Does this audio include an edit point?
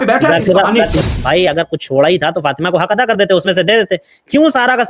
yes; 1 cut; at 0.9 s

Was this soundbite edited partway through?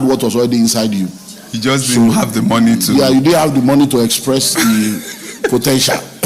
no; 0 cuts

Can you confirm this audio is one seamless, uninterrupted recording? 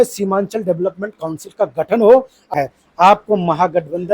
no; 1 cut; at 2.5 s

